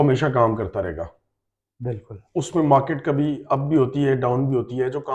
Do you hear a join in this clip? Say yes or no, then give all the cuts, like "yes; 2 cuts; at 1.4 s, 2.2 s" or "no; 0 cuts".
no; 0 cuts